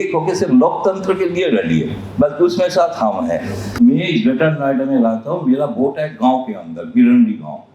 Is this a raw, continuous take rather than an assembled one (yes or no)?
no